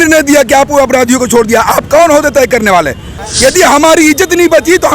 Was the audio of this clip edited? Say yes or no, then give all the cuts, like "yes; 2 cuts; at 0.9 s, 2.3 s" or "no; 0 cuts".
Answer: yes; 1 cut; at 3.2 s